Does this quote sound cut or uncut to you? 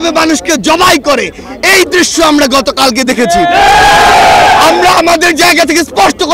uncut